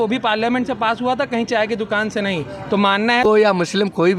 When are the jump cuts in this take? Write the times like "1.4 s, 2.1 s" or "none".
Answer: 3.3 s